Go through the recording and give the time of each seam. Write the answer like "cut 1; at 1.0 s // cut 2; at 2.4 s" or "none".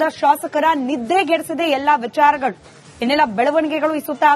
none